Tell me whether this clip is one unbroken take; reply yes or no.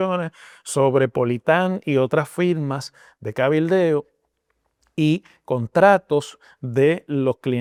yes